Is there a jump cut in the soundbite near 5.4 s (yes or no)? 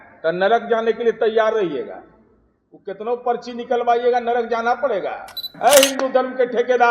yes